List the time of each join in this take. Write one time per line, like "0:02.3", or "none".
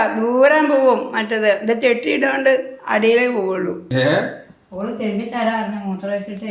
0:03.8